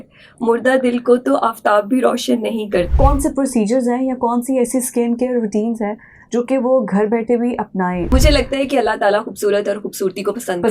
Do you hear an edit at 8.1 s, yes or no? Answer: yes